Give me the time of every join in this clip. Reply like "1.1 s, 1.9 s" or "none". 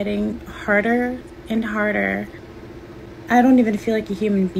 2.3 s